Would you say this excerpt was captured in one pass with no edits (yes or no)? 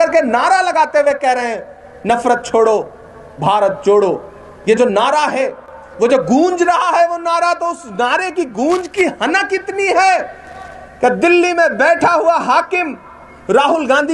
yes